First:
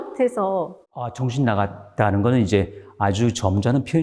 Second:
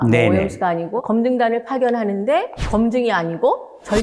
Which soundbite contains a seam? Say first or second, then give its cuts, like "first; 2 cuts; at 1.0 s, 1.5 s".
second; 1 cut; at 0.9 s